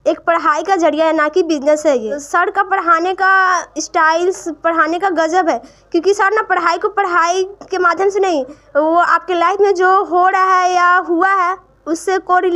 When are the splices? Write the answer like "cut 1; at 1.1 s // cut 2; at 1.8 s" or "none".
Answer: cut 1; at 2.2 s